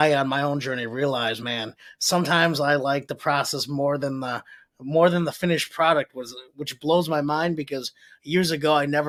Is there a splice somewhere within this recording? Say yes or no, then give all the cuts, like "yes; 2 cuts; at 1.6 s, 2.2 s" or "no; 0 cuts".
no; 0 cuts